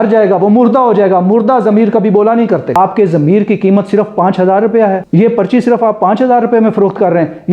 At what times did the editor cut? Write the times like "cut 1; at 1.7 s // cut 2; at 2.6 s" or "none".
cut 1; at 2.8 s // cut 2; at 5.0 s